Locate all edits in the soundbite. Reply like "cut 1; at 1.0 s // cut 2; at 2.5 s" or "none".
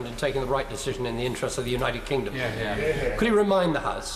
none